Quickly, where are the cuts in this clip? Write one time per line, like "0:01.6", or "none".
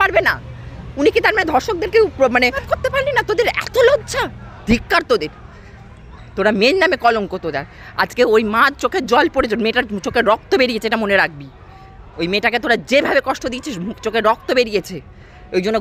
0:02.7